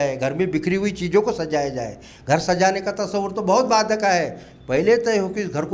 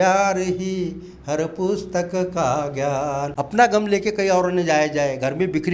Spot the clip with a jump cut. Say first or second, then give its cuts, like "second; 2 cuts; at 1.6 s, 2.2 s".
second; 1 cut; at 3.4 s